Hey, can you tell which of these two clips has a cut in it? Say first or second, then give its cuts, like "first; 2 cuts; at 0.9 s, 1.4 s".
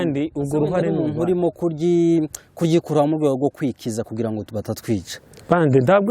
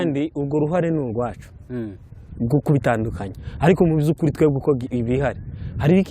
first; 1 cut; at 0.9 s